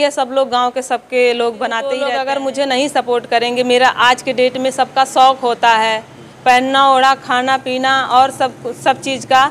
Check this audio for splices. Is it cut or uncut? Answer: cut